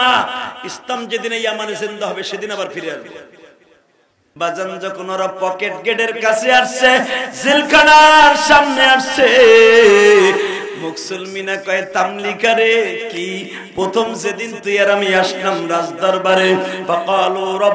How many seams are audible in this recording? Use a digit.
1